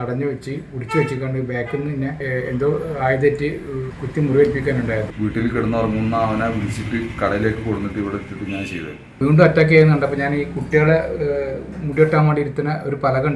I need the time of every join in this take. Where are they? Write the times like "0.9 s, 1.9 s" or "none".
5.1 s, 9.2 s